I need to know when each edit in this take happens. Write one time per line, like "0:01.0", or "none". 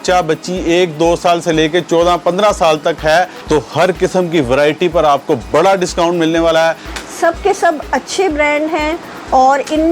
0:03.4
0:06.9